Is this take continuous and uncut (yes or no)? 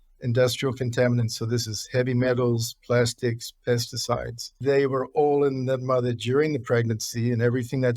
no